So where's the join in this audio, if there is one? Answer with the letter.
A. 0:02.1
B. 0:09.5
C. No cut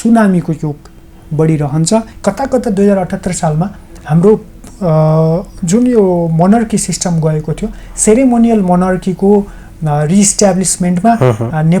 A